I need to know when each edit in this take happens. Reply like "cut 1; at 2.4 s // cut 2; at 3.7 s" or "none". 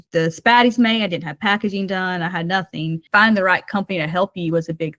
cut 1; at 3.0 s